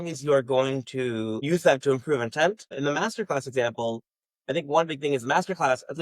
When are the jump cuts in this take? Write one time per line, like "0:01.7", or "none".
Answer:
0:01.4
0:02.7